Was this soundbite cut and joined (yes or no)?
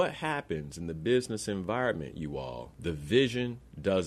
yes